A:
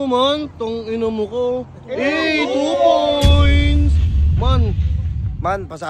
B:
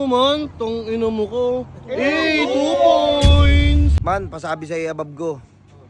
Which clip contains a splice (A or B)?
B